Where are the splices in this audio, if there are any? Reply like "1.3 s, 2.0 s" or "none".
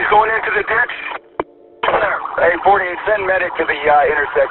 1.6 s